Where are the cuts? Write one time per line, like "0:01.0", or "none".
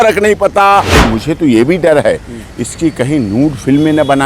0:01.0